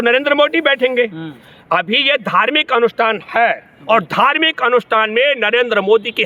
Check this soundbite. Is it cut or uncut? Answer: uncut